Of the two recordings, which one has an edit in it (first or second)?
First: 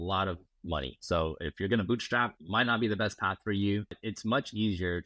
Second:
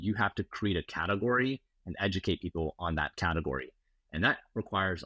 first